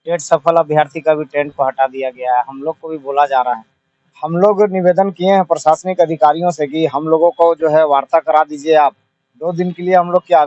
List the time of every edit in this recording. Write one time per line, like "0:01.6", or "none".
none